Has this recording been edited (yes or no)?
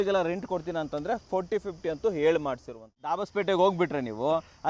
yes